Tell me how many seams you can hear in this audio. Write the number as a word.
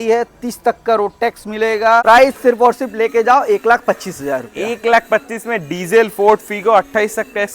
one